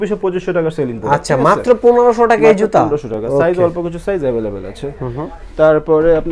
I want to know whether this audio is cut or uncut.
uncut